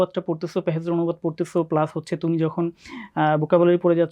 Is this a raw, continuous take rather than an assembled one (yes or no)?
yes